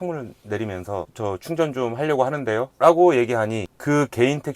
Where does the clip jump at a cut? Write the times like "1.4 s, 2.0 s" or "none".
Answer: 1.1 s, 2.7 s